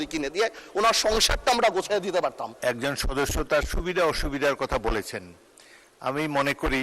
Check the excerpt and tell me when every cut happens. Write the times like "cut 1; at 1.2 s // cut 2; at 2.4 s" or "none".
cut 1; at 2.5 s